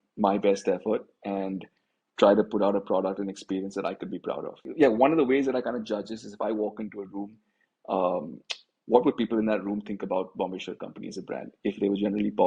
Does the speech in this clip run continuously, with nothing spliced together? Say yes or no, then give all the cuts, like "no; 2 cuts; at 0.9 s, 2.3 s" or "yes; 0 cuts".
no; 1 cut; at 4.7 s